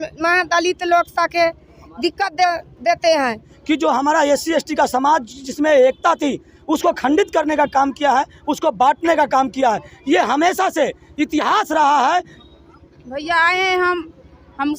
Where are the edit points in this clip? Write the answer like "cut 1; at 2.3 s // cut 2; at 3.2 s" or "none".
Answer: cut 1; at 3.5 s // cut 2; at 12.3 s